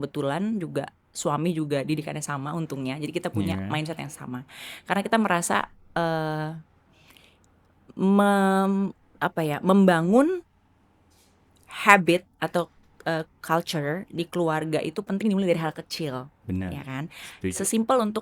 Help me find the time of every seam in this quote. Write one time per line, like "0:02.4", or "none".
none